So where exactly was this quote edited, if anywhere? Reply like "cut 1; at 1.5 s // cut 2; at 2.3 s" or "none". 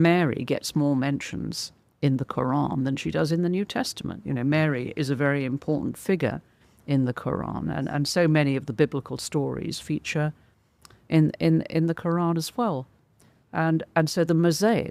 none